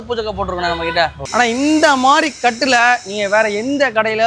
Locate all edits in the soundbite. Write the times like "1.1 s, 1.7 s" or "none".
1.2 s